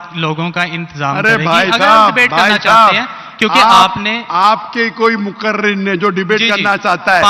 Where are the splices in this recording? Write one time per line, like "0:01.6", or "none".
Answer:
none

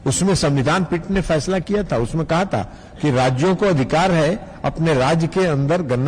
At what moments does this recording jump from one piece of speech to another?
none

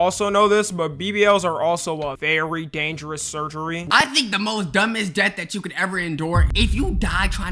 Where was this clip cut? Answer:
0:03.9
0:06.5

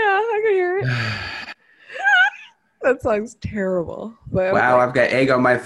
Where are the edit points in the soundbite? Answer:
0:04.6

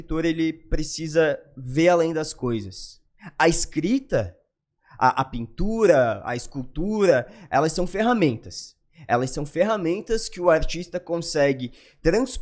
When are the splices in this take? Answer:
none

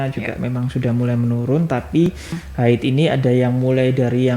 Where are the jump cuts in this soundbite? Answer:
0:02.4

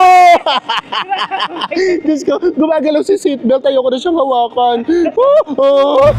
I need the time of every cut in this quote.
none

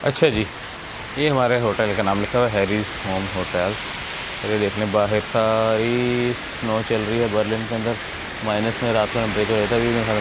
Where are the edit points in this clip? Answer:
none

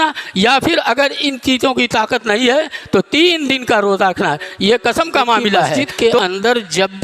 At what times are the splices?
0:05.8

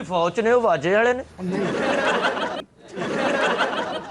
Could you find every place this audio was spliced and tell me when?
0:02.7

